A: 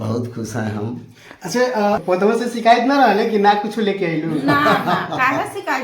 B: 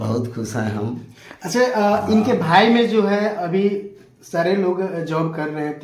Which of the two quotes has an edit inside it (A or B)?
A